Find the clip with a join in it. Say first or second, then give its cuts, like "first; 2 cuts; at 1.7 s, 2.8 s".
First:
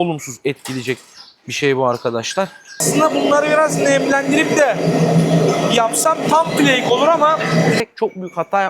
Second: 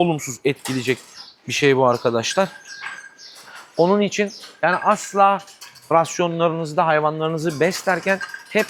first; 2 cuts; at 2.8 s, 7.8 s